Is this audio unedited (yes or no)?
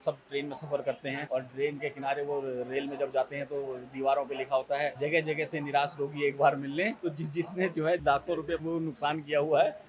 no